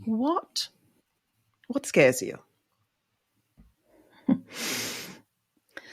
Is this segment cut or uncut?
uncut